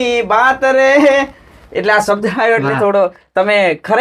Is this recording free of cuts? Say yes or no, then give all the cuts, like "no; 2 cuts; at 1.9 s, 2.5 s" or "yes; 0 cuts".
yes; 0 cuts